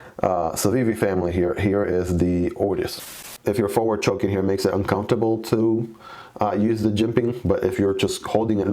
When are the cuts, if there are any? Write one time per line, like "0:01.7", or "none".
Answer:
0:03.1